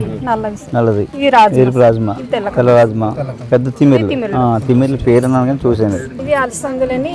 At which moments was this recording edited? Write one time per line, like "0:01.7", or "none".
0:01.1
0:06.1